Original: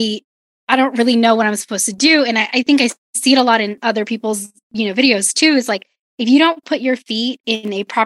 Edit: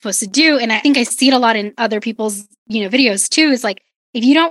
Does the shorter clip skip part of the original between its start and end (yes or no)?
yes